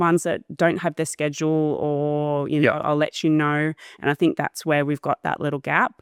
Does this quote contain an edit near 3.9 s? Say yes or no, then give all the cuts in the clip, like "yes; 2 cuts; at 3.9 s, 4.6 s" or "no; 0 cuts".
no; 0 cuts